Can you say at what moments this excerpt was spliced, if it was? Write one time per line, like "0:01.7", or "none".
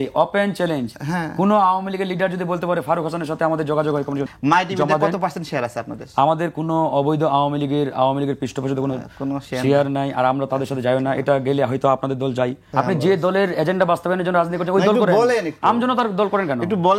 0:04.3
0:12.7